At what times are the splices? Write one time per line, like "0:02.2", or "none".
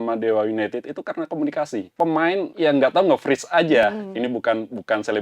0:01.9
0:02.5